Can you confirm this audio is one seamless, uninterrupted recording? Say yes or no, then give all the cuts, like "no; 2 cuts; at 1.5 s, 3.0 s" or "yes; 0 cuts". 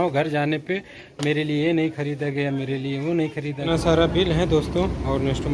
no; 1 cut; at 3.7 s